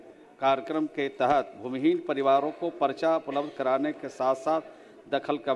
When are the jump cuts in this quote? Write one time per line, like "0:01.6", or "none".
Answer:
none